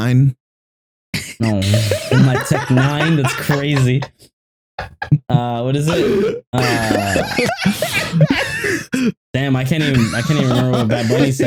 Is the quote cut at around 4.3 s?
no; 0 cuts

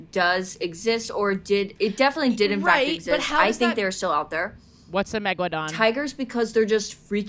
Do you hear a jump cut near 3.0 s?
no; 1 cut; at 5.7 s

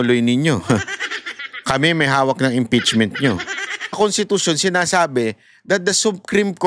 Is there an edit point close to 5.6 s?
no; 1 cut; at 4.0 s

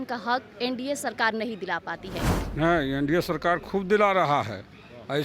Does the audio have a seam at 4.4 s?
no; 1 cut; at 2.3 s

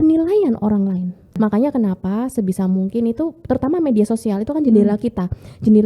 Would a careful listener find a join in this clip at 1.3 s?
yes; 1 cut; at 1.3 s

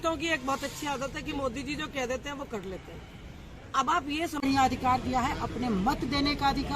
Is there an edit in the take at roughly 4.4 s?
yes; 1 cut; at 4.4 s

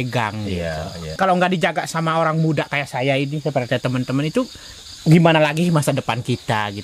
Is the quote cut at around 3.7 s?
no; 1 cut; at 1.2 s

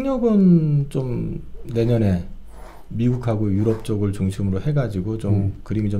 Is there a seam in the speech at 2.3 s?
no; 0 cuts

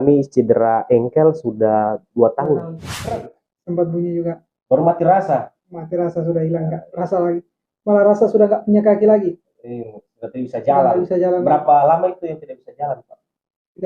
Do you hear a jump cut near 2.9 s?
yes; 1 cut; at 2.9 s

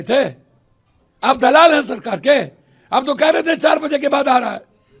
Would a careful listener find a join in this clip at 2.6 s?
no; 0 cuts

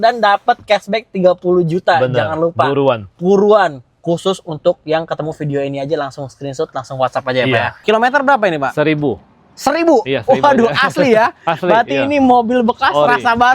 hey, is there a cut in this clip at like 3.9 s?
no; 1 cut; at 7.7 s

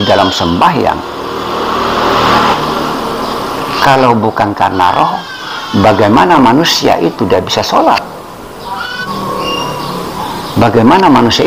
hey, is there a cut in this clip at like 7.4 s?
no; 2 cuts; at 2.5 s, 9.0 s

